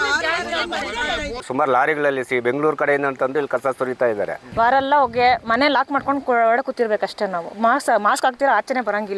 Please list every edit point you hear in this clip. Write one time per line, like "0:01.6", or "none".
0:01.4
0:04.4